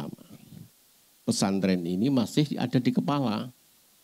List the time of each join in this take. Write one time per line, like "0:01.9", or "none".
0:01.0

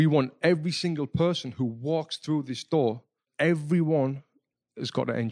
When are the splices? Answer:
0:03.3

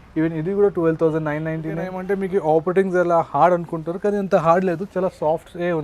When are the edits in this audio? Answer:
0:01.9

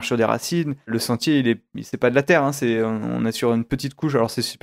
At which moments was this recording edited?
0:00.9

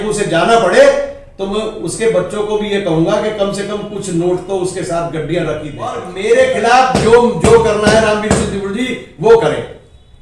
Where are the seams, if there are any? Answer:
0:06.1

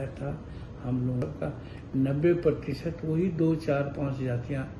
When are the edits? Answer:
0:01.2

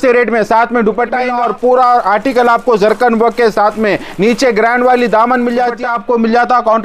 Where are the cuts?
0:01.3
0:05.7

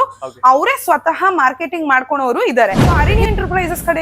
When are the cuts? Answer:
0:03.1

